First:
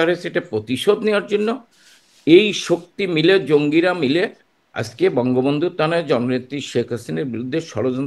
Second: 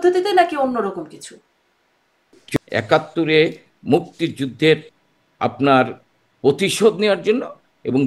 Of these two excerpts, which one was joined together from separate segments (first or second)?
second